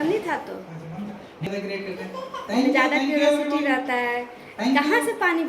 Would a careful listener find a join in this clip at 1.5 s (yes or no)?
yes